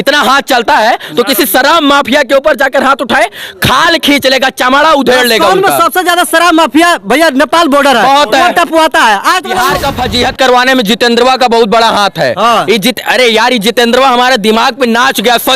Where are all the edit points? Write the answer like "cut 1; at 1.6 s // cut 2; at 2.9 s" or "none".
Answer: cut 1; at 9.5 s